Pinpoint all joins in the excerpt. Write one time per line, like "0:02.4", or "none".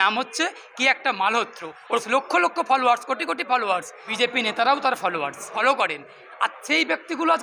0:02.1
0:04.0
0:05.5